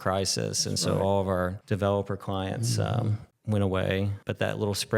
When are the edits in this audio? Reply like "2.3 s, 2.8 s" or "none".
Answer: 1.6 s, 3.3 s, 4.2 s